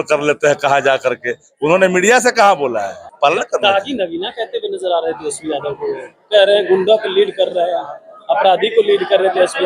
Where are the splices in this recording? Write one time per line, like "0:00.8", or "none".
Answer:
0:03.0